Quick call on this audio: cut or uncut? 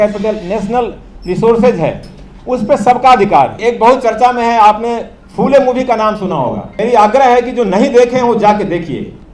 cut